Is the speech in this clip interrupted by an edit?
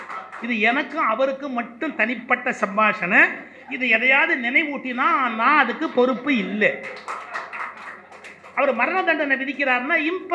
no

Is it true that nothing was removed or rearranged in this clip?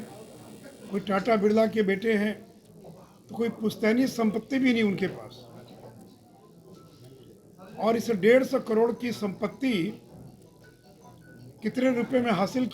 no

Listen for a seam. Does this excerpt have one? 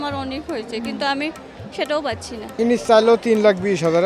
yes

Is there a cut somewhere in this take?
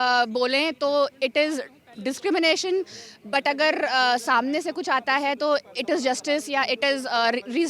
no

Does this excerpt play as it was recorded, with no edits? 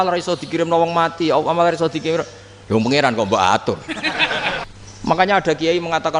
no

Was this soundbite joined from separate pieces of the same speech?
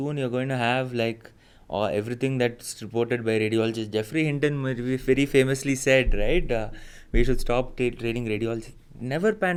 no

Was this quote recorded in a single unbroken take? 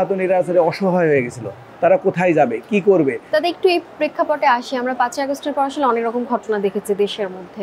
yes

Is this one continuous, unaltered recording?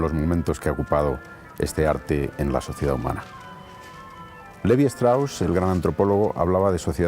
no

